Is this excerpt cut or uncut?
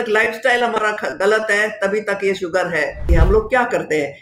cut